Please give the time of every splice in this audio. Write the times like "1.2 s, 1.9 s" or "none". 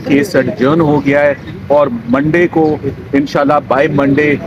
none